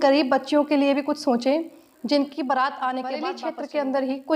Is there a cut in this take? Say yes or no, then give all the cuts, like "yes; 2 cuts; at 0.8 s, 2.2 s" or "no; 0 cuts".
yes; 1 cut; at 3.3 s